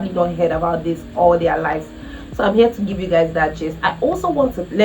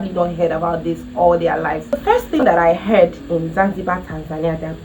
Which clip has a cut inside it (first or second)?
second